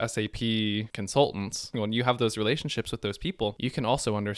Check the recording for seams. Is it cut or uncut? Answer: cut